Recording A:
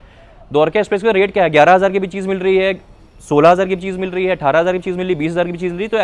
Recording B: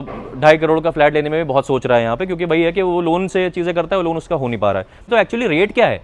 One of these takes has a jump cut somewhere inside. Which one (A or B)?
B